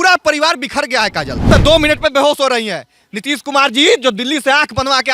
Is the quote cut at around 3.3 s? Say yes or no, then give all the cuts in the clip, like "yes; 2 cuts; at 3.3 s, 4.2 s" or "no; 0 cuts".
no; 1 cut; at 1.5 s